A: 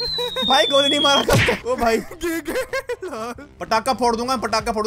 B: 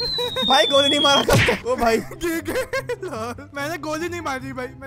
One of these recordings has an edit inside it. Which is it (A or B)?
A